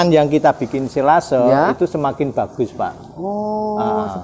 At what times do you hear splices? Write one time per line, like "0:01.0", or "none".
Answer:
none